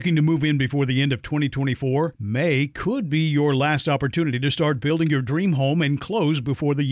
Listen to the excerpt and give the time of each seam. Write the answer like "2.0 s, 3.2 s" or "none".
none